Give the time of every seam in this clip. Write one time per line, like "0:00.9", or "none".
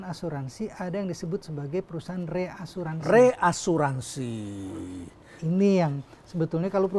none